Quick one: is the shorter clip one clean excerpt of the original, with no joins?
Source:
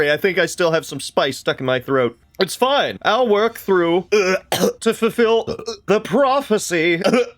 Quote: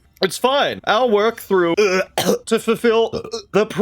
no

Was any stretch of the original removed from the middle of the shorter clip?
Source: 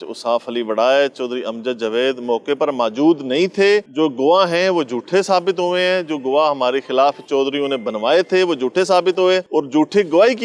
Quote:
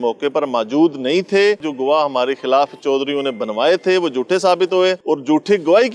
yes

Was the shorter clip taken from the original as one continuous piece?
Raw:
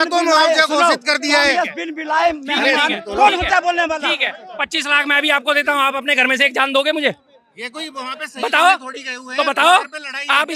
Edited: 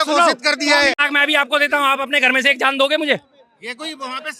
no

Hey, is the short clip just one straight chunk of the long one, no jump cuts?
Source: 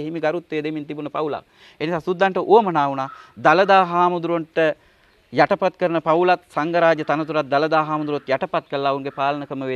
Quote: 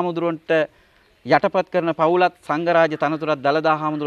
yes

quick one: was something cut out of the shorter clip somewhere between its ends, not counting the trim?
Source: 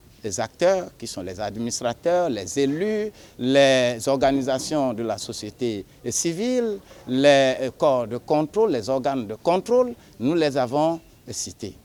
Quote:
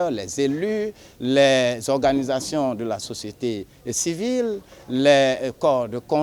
no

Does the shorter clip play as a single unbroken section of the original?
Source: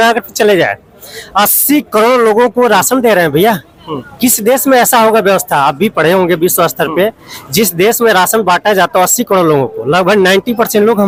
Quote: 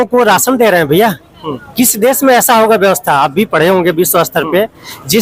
yes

